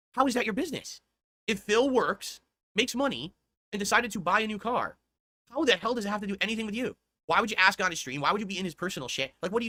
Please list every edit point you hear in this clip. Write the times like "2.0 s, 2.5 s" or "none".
none